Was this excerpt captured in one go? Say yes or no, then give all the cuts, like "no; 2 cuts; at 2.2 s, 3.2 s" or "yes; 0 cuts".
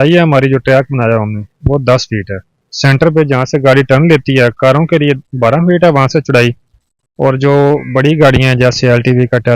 yes; 0 cuts